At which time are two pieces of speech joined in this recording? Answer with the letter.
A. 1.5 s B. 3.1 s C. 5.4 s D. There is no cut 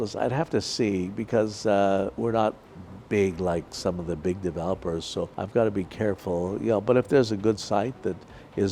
C